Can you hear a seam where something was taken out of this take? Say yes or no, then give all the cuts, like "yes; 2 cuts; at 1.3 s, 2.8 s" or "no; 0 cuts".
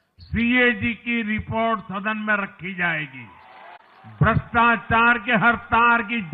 yes; 1 cut; at 3.8 s